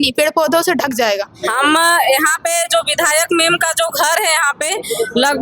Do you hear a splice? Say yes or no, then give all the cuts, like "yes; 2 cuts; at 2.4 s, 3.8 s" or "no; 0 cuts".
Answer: yes; 1 cut; at 1.4 s